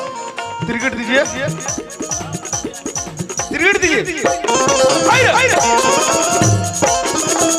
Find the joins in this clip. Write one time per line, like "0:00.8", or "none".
none